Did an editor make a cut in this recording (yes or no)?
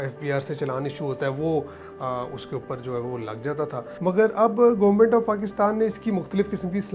yes